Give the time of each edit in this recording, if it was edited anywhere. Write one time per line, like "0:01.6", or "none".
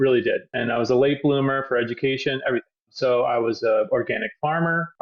none